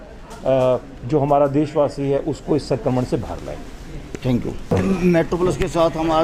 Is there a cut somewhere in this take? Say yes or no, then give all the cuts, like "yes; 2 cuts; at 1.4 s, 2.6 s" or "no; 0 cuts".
no; 0 cuts